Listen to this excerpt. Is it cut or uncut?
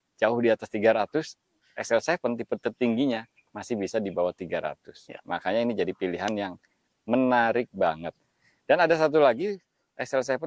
uncut